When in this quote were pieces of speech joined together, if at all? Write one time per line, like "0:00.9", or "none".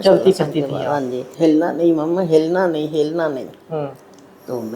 0:01.2